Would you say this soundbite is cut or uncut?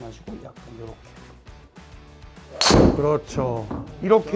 uncut